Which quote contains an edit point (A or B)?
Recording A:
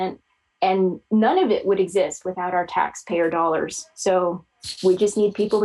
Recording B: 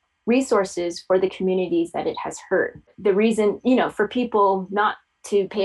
B